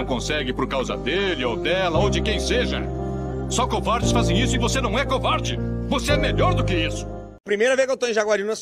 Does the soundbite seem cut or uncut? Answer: cut